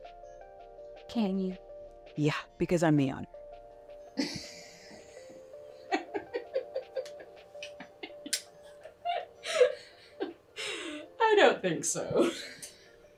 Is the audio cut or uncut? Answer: uncut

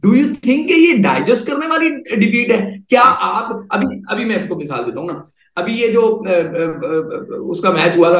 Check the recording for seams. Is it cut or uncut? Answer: uncut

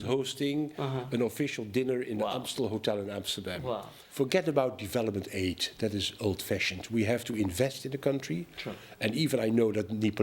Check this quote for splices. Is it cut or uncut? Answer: cut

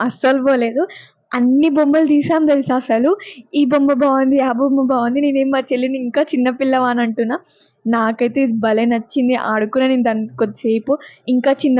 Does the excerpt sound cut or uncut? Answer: uncut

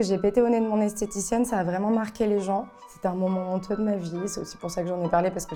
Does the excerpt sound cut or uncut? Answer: uncut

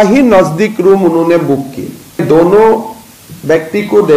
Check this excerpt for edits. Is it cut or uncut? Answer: cut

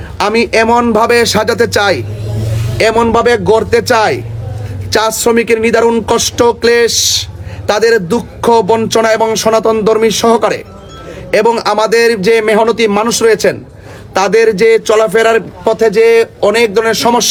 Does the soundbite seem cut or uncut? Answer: uncut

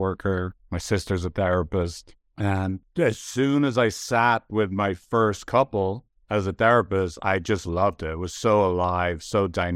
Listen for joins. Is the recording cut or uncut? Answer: cut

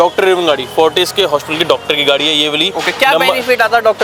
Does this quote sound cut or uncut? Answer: uncut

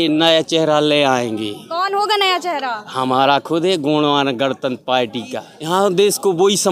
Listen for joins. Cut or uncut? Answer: cut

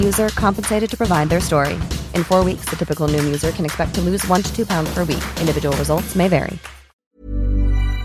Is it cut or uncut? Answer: cut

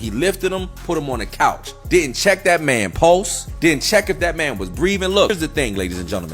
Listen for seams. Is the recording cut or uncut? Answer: cut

